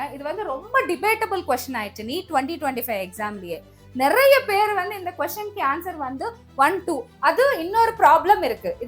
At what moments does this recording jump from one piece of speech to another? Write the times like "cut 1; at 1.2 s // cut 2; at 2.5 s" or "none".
none